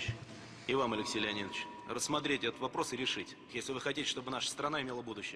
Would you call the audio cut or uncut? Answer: cut